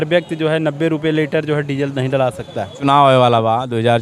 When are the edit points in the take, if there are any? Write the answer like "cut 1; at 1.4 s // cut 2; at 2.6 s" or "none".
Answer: cut 1; at 2.7 s